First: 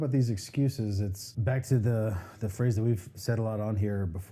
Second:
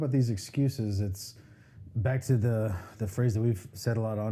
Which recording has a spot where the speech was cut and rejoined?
first; 1 cut; at 1.2 s

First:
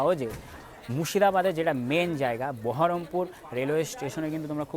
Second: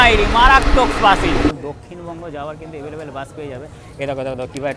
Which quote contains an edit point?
second; 1 cut; at 1.5 s

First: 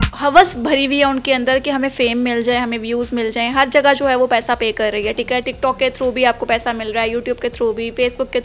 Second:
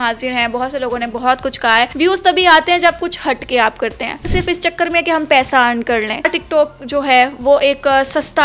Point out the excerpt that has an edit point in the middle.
second; 3 cuts; at 1.9 s, 4.3 s, 6.4 s

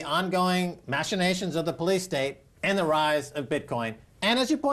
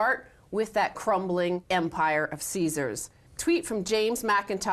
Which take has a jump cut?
second; 1 cut; at 3.7 s

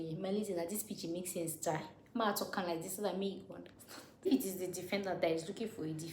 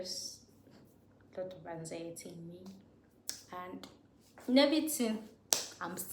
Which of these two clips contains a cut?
first; 1 cut; at 4.3 s

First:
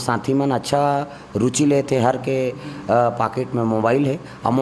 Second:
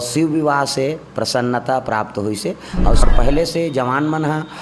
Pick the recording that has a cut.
second; 1 cut; at 3.0 s

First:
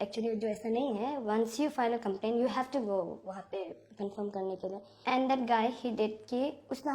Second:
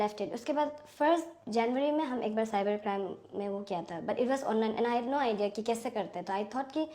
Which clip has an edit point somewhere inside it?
first; 1 cut; at 5.0 s

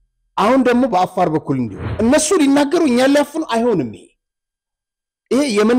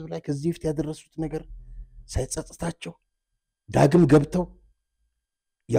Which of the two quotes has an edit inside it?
first; 1 cut; at 1.8 s

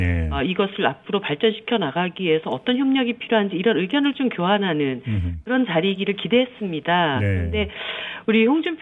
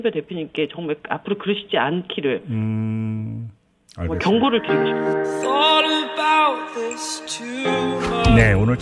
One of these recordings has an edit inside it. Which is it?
second; 1 cut; at 4.6 s

